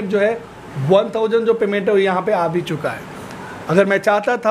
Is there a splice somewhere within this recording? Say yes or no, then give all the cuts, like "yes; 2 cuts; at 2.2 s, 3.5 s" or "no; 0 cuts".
no; 0 cuts